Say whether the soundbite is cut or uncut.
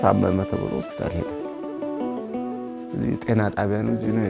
cut